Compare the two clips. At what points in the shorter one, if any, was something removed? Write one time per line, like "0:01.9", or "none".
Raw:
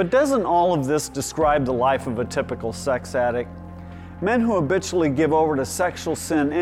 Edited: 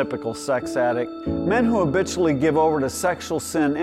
0:01.2